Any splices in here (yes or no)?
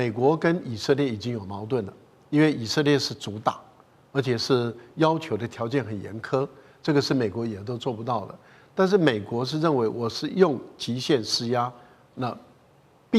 no